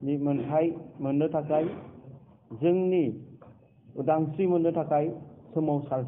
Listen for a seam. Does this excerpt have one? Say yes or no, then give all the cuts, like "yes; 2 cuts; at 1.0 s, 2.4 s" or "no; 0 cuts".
no; 0 cuts